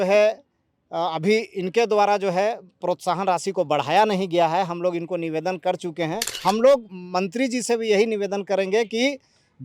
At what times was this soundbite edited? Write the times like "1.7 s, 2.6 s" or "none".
6.3 s